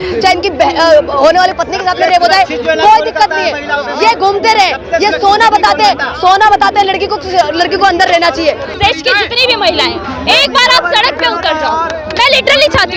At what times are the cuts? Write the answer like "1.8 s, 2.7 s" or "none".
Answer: 8.7 s